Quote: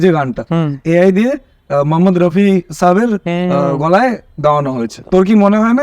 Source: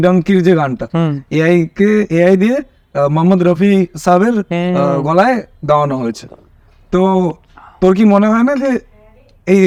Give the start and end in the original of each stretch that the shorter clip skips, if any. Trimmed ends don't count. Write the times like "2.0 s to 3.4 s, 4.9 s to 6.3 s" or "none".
1.3 s to 2.1 s, 6.2 s to 7.6 s